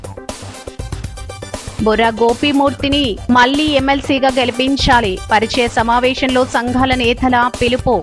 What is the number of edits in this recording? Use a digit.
1